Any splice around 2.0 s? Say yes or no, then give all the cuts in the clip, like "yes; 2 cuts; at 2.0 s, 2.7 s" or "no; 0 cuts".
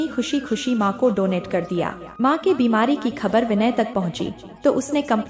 yes; 1 cut; at 2.0 s